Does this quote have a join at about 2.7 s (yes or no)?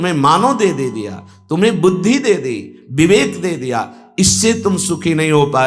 no